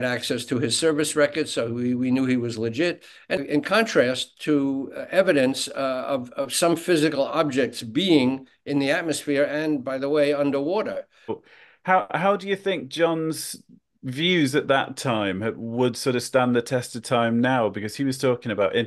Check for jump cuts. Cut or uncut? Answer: cut